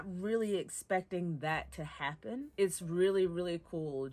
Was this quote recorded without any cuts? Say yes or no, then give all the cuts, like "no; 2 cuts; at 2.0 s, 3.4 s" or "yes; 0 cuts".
no; 1 cut; at 2.5 s